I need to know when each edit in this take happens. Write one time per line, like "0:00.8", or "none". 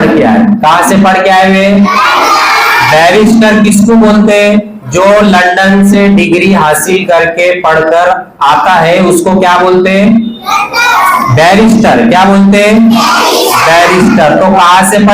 none